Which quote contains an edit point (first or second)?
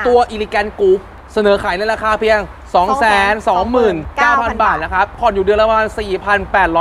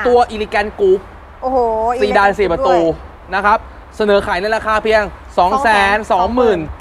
first